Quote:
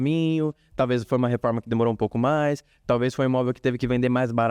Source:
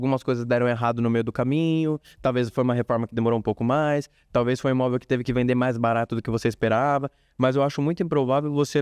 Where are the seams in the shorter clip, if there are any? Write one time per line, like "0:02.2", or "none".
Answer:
none